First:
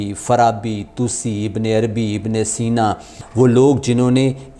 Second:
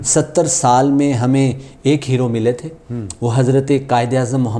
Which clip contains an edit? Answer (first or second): first